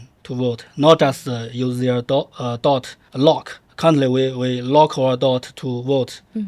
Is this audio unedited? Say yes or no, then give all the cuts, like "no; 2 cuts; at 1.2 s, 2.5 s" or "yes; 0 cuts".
no; 1 cut; at 3.2 s